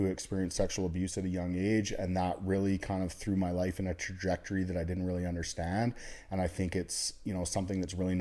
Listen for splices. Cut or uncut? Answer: uncut